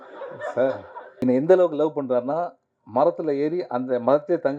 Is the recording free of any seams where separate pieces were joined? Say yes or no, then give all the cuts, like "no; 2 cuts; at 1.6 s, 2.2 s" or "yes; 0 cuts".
no; 1 cut; at 1.0 s